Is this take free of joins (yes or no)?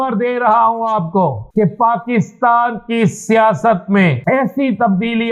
no